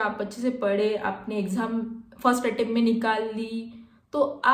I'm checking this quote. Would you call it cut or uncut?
uncut